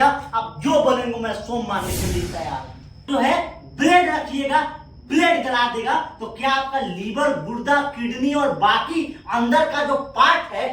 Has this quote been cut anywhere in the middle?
yes; 1 cut; at 3.0 s

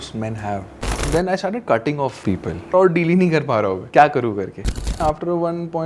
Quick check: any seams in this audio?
yes; 4 cuts; at 1.0 s, 2.7 s, 3.8 s, 5.0 s

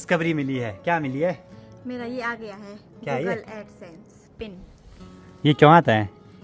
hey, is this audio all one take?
yes; 0 cuts

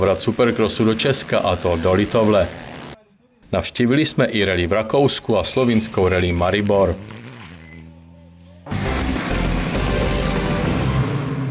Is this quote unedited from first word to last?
no; 1 cut; at 8.7 s

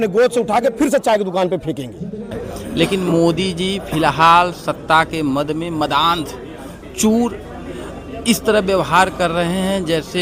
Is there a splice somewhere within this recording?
yes; 2 cuts; at 2.3 s, 9.1 s

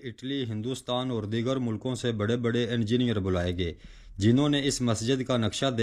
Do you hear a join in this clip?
no; 0 cuts

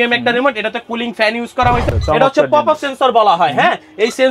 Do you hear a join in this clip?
yes; 1 cut; at 1.9 s

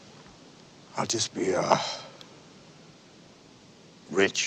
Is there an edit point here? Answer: no; 0 cuts

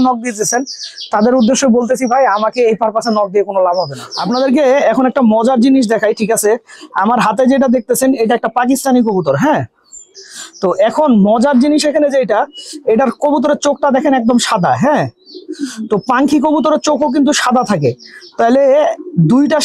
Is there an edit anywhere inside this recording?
no; 0 cuts

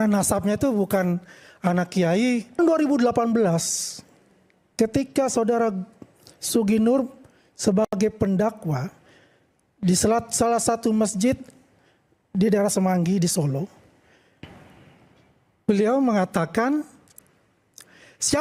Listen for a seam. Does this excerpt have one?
yes; 1 cut; at 2.6 s

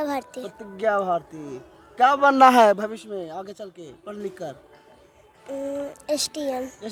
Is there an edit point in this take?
no; 0 cuts

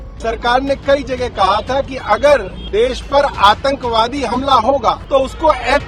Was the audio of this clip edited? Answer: yes; 2 cuts; at 2.6 s, 5.0 s

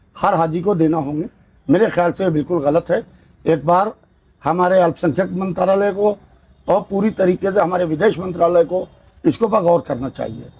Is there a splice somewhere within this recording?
no; 0 cuts

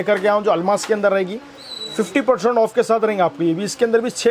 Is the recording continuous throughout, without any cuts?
yes; 0 cuts

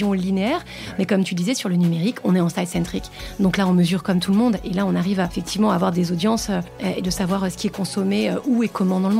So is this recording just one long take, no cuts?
no; 2 cuts; at 5.4 s, 6.7 s

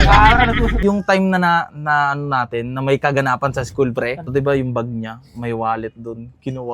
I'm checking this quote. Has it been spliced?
yes; 2 cuts; at 0.8 s, 4.3 s

